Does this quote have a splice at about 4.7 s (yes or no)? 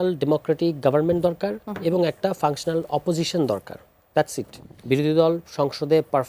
yes